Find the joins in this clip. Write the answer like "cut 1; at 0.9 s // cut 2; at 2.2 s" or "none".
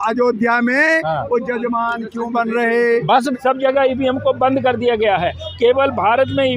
cut 1; at 3.3 s